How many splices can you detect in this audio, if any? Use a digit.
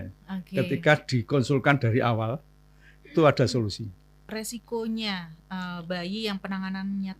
1